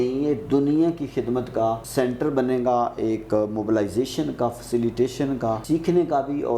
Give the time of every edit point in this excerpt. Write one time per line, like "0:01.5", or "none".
0:01.8
0:05.6